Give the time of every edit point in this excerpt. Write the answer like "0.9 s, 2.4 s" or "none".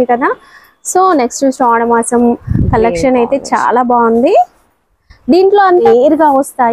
5.8 s